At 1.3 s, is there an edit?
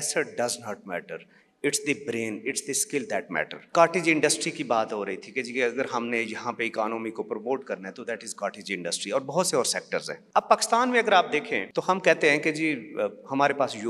no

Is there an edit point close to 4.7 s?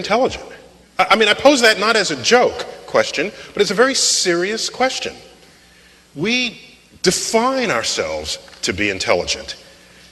yes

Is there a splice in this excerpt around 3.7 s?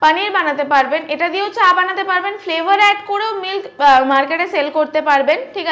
no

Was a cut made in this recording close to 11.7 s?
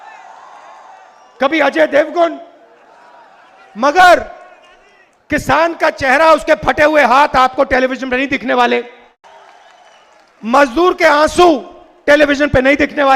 no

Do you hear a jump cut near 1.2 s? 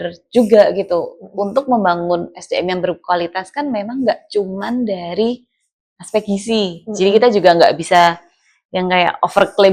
no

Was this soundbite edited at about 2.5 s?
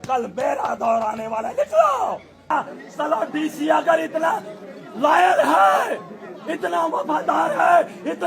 yes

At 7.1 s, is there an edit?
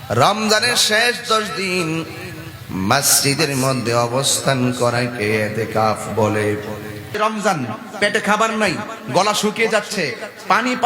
yes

